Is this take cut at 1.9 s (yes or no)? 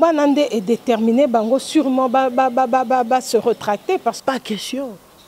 no